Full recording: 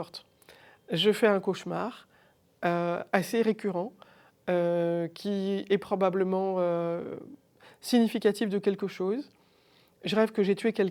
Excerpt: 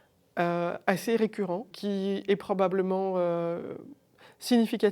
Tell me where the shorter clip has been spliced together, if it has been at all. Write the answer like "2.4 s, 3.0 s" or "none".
1.7 s